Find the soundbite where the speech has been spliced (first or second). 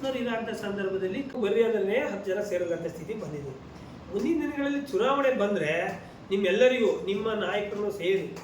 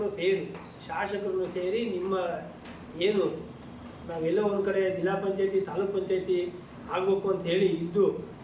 first